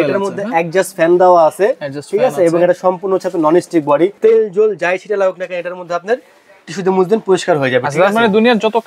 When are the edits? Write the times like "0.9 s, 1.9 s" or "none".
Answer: 4.1 s